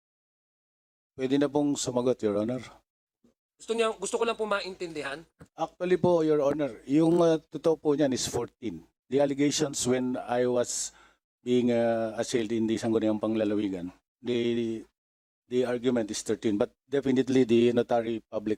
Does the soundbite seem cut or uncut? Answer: uncut